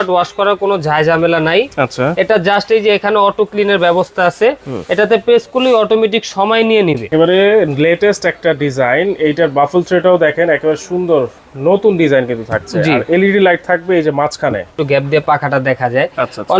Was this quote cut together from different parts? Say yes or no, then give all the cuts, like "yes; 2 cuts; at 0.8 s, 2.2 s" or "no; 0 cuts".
yes; 2 cuts; at 7.1 s, 14.8 s